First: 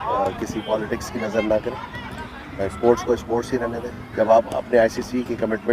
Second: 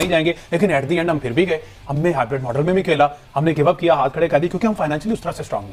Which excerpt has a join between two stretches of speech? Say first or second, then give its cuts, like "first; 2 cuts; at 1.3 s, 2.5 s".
first; 1 cut; at 3.9 s